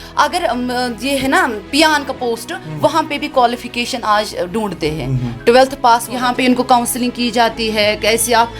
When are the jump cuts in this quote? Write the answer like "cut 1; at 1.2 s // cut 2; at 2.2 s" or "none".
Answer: cut 1; at 6.1 s